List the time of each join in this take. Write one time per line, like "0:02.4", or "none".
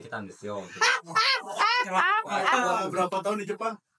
0:02.6